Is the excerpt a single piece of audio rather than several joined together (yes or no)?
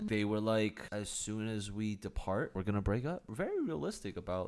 no